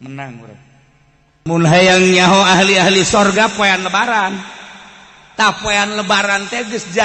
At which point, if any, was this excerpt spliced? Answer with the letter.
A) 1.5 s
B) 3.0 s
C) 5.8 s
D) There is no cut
A